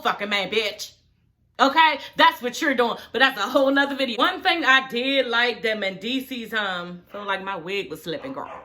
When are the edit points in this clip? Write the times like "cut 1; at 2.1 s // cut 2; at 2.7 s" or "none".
cut 1; at 4.2 s